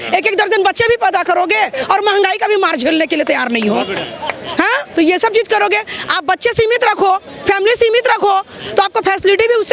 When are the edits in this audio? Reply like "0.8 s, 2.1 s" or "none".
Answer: none